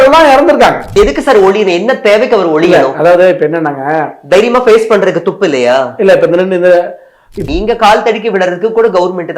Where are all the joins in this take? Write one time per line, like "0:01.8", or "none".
0:00.9
0:07.4